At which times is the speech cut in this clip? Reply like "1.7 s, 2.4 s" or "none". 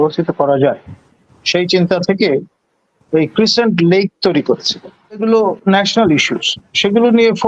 5.2 s